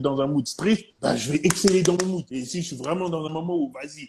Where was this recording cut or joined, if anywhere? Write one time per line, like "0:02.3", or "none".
0:00.9
0:02.3